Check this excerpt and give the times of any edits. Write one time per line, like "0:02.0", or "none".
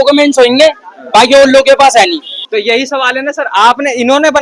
0:02.3